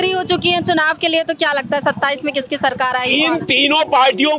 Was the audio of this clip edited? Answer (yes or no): no